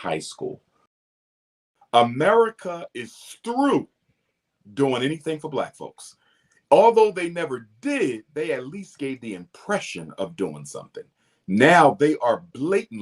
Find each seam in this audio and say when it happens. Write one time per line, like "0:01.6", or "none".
0:01.4